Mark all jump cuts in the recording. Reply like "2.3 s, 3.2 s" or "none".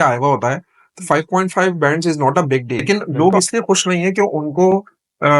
2.8 s